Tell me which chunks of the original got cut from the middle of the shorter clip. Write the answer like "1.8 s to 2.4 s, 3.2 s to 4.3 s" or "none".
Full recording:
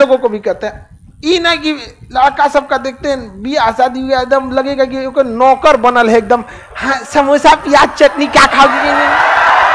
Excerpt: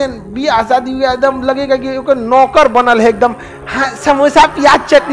none